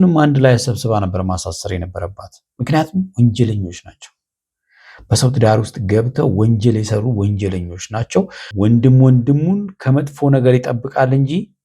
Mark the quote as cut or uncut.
cut